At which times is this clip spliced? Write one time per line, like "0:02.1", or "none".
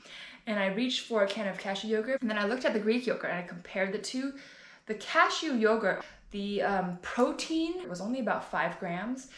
0:02.2
0:06.0
0:07.9